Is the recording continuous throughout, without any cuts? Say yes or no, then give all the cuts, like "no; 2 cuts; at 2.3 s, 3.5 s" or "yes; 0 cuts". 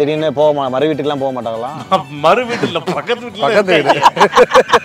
yes; 0 cuts